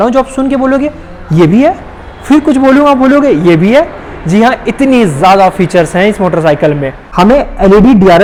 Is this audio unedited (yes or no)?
yes